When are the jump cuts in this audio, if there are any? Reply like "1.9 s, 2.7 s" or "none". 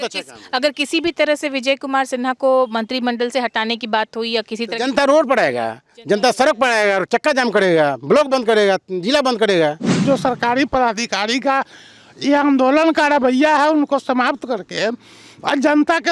9.9 s